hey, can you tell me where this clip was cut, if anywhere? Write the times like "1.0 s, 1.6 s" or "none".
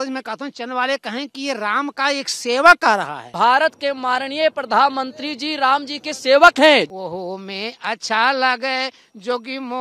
3.2 s, 6.9 s